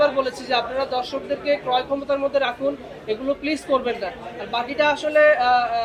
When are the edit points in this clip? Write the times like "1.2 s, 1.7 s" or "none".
none